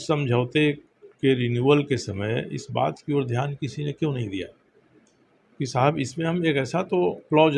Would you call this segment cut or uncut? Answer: uncut